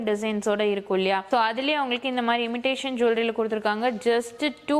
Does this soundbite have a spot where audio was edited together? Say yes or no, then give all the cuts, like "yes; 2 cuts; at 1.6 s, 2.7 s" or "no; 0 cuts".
yes; 1 cut; at 1.2 s